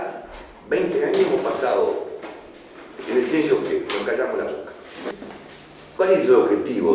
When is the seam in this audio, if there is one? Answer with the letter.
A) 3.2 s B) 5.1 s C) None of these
B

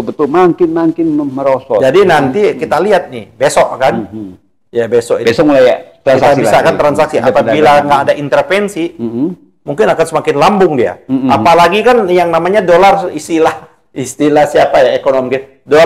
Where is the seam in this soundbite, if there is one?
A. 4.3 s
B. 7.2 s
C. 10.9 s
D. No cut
D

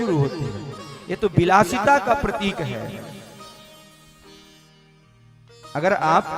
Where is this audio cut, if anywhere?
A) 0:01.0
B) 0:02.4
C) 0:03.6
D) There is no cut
D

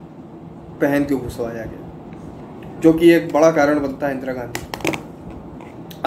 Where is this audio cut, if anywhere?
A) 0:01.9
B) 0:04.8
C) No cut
C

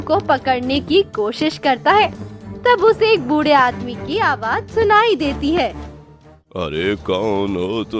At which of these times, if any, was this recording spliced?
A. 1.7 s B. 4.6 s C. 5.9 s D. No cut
D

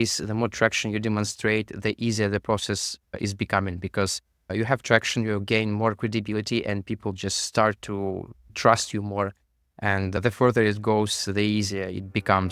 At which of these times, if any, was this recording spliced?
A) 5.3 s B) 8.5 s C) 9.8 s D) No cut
B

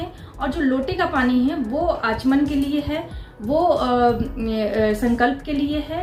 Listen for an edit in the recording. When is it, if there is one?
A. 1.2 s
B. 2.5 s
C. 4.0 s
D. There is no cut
D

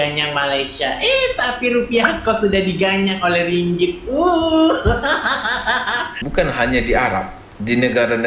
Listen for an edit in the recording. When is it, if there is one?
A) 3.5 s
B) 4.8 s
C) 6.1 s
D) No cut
C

